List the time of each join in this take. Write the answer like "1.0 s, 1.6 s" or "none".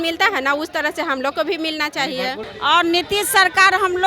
2.5 s